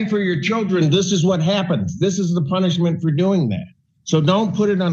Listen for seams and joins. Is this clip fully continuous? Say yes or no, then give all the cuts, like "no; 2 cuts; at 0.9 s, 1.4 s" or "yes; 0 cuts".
yes; 0 cuts